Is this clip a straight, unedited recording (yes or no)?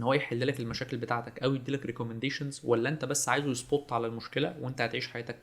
yes